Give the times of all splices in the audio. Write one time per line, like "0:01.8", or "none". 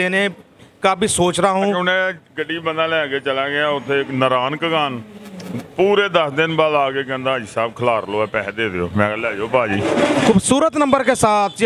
0:01.8
0:09.8